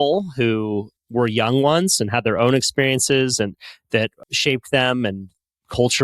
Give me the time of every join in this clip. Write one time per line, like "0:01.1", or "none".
0:00.9
0:04.2